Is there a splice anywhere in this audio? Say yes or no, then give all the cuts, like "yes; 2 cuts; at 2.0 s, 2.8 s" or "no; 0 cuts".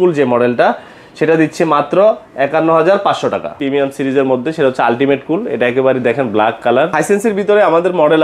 yes; 2 cuts; at 3.5 s, 6.9 s